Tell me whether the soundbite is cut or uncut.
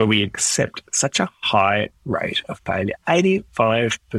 uncut